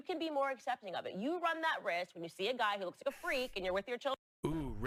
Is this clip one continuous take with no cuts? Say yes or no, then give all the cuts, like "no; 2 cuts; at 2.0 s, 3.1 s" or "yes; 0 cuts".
yes; 0 cuts